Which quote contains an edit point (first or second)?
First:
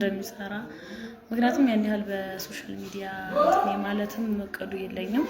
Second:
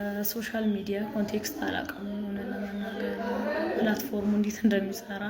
first